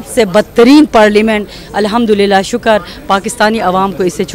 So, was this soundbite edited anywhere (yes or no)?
no